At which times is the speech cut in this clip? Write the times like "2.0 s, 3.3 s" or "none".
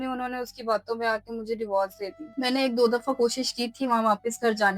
2.2 s

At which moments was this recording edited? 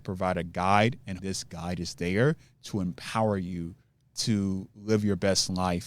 1.2 s

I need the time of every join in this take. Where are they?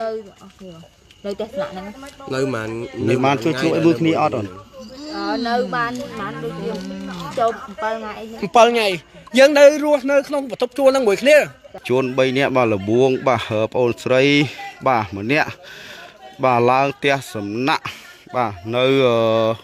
11.8 s

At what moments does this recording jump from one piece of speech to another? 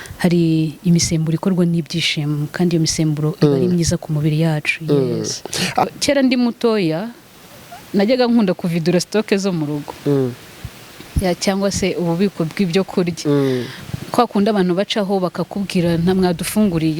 5.9 s

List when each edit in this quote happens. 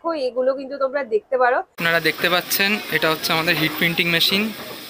1.8 s

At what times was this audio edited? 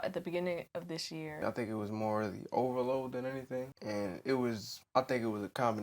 1.4 s, 3.7 s, 4.7 s

